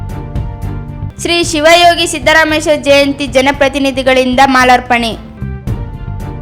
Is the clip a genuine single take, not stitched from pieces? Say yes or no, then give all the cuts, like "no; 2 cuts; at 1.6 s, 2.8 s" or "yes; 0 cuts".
yes; 0 cuts